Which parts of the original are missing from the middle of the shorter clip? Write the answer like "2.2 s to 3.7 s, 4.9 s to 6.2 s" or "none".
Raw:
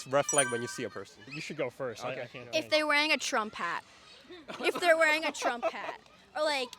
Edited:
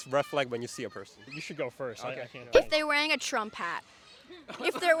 none